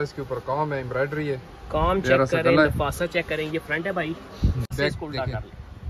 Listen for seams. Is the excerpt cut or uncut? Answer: cut